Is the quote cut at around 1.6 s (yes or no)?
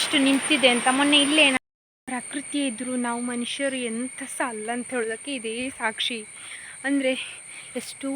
yes